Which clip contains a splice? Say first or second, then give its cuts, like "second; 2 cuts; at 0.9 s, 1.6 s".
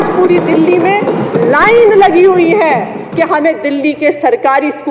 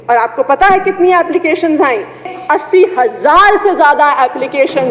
second; 1 cut; at 2.3 s